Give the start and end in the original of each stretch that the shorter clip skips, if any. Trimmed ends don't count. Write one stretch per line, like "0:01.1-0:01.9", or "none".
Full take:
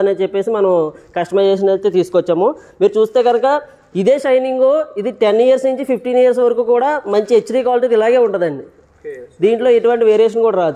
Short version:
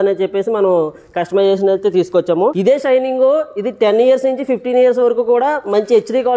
0:02.6-0:04.0